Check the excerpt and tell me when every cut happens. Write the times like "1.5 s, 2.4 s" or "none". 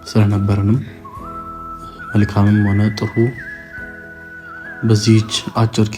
none